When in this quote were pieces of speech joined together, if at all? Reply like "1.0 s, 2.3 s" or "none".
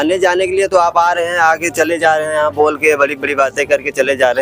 none